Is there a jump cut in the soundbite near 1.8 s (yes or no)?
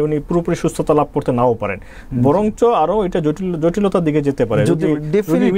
no